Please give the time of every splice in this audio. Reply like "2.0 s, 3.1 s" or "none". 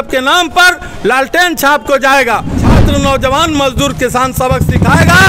2.7 s